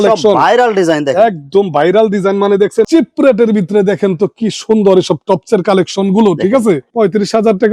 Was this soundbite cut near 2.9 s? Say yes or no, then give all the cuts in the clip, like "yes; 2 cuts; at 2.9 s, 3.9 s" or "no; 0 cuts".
yes; 2 cuts; at 2.9 s, 6.9 s